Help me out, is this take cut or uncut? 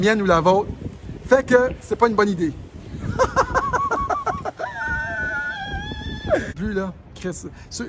cut